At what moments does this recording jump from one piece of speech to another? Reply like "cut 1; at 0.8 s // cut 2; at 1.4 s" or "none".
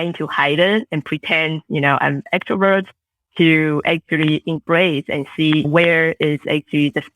cut 1; at 5.7 s